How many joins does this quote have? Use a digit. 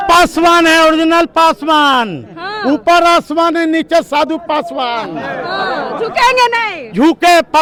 0